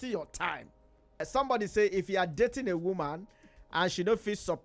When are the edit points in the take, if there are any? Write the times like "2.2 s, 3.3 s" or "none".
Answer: 1.2 s